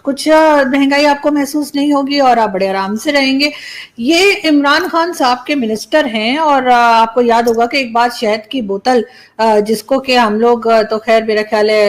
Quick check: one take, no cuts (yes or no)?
yes